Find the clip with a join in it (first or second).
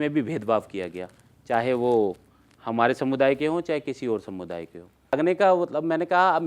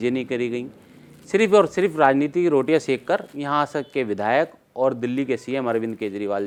first